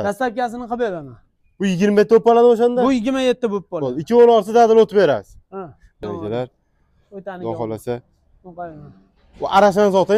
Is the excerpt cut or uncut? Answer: cut